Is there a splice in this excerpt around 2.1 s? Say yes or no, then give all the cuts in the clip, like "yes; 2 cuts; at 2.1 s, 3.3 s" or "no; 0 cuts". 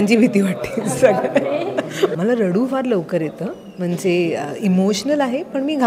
yes; 1 cut; at 2.1 s